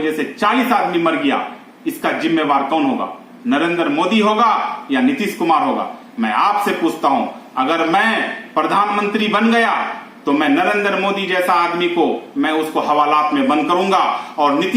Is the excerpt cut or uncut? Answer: uncut